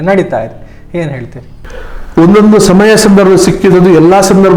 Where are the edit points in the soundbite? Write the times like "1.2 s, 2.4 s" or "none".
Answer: 1.6 s